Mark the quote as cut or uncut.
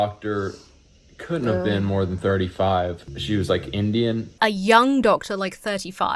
cut